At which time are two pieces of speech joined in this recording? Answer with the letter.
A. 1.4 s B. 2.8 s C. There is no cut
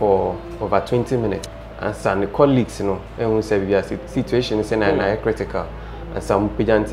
A